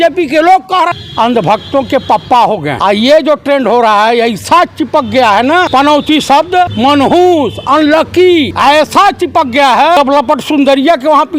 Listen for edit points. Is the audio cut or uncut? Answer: cut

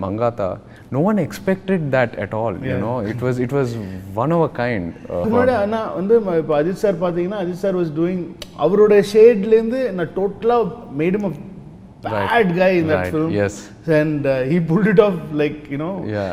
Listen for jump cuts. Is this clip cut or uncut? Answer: cut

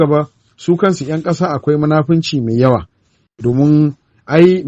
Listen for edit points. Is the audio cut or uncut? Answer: uncut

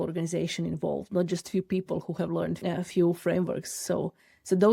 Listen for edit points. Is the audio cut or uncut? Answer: cut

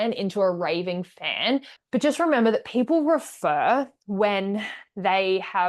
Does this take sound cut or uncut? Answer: cut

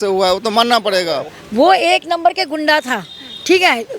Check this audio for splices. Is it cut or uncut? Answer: cut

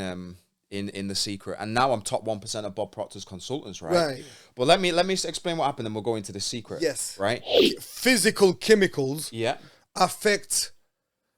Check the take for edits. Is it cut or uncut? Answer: cut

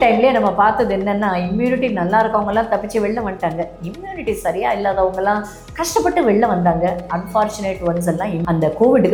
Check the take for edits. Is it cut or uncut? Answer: uncut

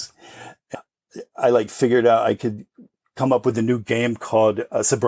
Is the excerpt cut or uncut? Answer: uncut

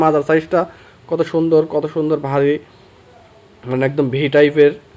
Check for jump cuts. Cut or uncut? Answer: uncut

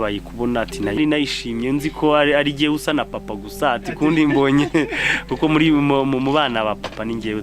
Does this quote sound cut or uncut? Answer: uncut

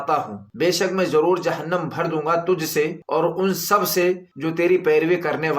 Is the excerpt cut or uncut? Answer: cut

